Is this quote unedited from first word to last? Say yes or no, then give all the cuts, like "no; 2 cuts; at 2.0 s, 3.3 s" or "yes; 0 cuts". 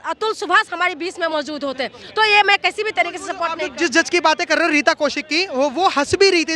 yes; 0 cuts